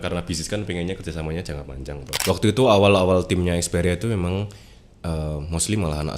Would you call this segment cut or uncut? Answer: cut